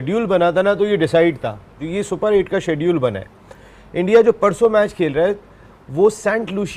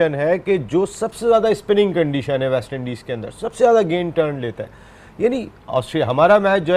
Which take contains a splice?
first; 1 cut; at 1.9 s

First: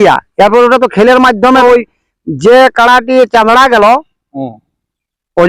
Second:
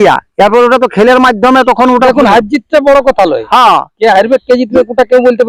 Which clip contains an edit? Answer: first; 1 cut; at 1.6 s

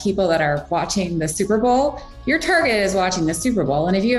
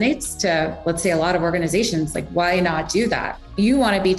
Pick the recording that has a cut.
second; 1 cut; at 3.3 s

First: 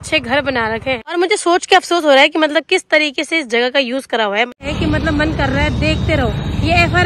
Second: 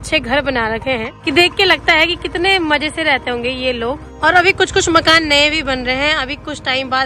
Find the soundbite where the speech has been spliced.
first; 2 cuts; at 1.2 s, 4.6 s

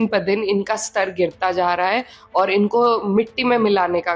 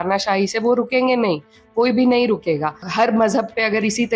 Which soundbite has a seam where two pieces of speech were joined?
second; 1 cut; at 2.9 s

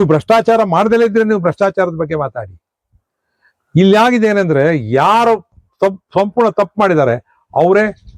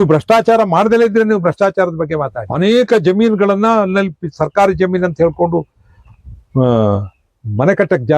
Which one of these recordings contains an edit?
second; 1 cut; at 2.4 s

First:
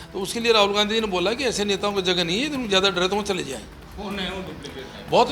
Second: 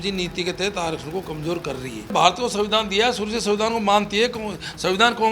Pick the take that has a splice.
second; 1 cut; at 2.1 s

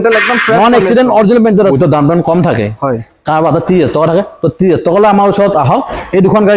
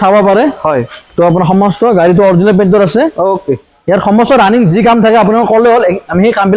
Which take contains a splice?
first; 1 cut; at 1.7 s

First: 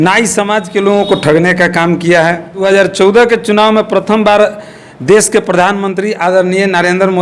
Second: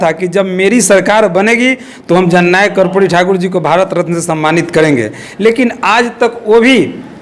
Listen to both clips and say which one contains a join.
first; 1 cut; at 2.6 s

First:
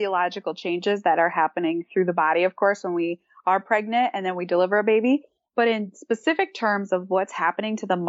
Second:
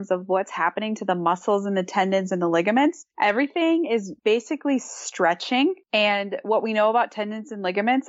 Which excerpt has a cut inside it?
second; 3 cuts; at 3.1 s, 4.1 s, 5.8 s

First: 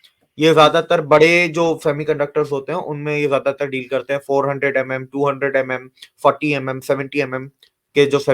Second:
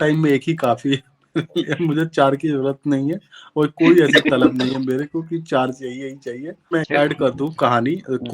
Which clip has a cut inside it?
second; 1 cut; at 6.7 s

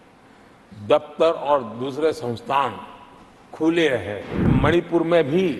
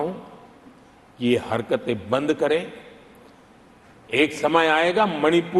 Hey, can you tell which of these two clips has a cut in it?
first; 1 cut; at 4.5 s

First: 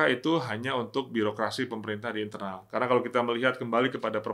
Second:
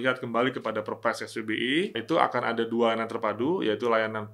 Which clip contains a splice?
second; 1 cut; at 2.0 s

